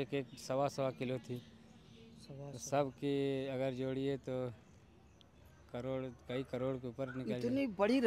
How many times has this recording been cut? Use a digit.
0